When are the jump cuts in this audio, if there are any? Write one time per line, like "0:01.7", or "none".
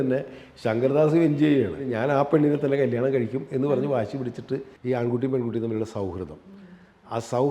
0:01.9
0:04.7